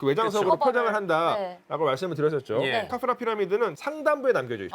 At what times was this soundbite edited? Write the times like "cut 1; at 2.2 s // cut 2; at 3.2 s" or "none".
cut 1; at 2.9 s